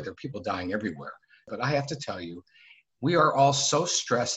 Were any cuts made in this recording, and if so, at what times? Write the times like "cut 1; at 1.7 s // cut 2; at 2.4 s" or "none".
cut 1; at 1.5 s